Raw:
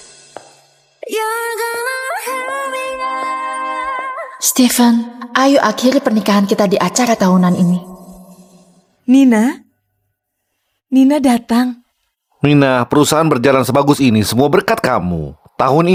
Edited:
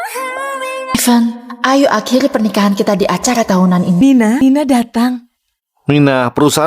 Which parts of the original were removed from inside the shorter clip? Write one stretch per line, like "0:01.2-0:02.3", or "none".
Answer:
0:03.1-0:04.7
0:07.9-0:10.8